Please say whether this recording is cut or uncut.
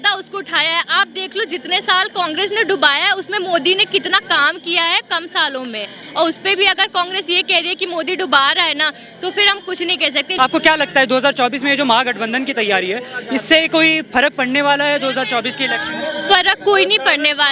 cut